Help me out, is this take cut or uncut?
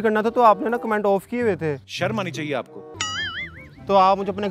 cut